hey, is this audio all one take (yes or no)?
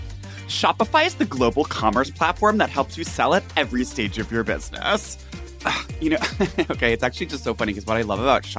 no